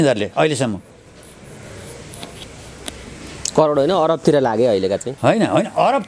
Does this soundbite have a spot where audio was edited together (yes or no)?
no